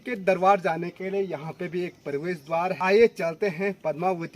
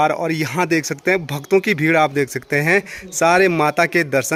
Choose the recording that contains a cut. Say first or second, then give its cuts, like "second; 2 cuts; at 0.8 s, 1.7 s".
first; 1 cut; at 2.8 s